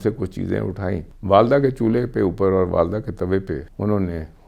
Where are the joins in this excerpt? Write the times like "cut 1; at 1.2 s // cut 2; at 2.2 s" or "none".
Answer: cut 1; at 1.1 s // cut 2; at 3.7 s